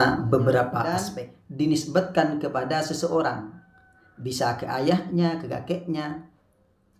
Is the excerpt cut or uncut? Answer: cut